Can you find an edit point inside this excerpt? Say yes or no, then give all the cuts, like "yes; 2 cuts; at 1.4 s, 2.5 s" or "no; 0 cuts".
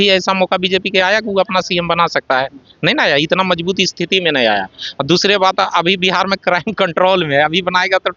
no; 0 cuts